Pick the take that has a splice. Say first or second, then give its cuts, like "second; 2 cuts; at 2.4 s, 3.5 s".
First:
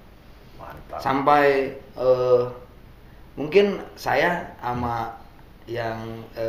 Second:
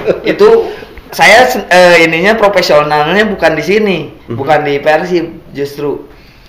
second; 1 cut; at 1.0 s